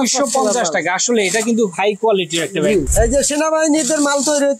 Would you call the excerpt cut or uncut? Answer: cut